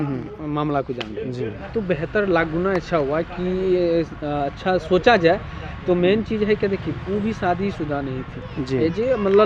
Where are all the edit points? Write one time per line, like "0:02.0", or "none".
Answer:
0:01.6